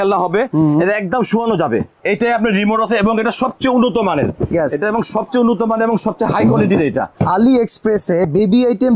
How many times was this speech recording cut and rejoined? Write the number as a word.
two